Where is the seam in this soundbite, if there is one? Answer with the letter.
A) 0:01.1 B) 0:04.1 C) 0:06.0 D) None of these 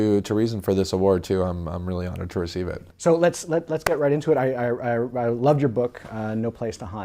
B